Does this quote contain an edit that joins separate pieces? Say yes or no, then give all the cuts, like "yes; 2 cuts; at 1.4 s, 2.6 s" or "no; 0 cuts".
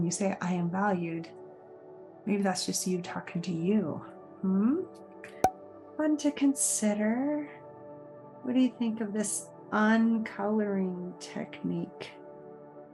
no; 0 cuts